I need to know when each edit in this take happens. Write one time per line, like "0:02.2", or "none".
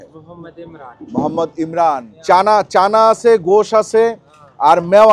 0:02.1